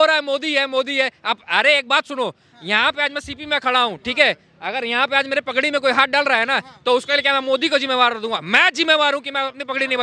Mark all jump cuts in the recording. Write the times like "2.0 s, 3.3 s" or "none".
none